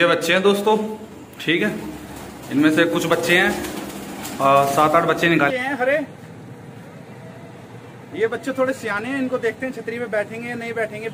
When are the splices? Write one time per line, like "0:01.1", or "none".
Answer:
0:05.5